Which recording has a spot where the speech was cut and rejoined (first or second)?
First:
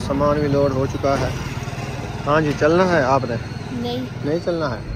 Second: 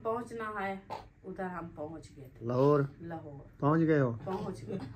second